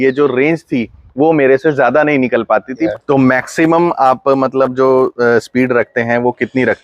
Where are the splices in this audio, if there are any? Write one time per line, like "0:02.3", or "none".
0:02.9